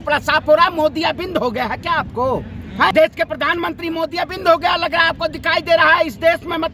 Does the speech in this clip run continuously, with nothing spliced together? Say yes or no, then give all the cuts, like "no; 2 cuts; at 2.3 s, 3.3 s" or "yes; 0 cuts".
no; 1 cut; at 2.9 s